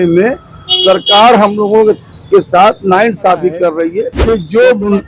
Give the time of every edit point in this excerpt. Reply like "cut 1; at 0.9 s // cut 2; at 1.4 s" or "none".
cut 1; at 4.1 s

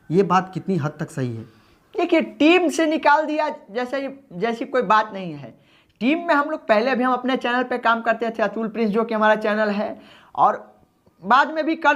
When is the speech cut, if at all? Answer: none

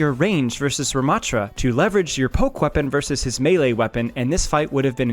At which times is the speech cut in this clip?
cut 1; at 1.5 s

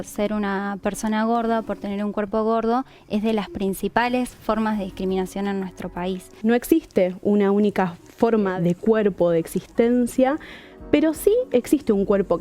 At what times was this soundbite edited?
cut 1; at 6.3 s // cut 2; at 8.5 s

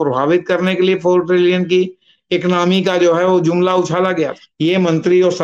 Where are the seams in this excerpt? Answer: cut 1; at 4.4 s

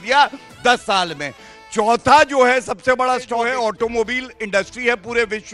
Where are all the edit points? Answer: cut 1; at 3.4 s

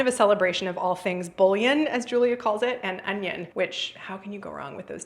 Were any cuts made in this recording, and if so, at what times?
cut 1; at 3.5 s

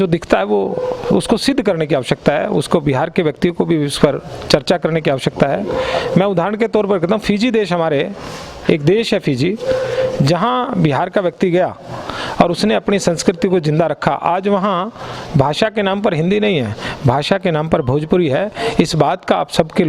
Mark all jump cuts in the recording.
none

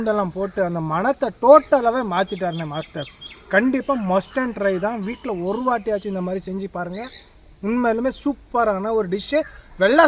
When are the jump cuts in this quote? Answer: none

